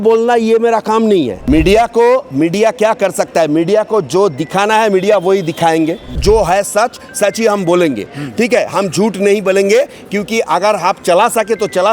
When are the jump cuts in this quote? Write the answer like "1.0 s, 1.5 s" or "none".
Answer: 1.4 s, 6.1 s